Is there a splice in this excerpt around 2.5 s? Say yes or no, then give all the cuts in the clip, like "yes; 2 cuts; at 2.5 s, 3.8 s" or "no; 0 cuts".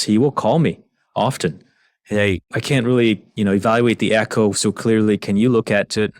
yes; 1 cut; at 2.5 s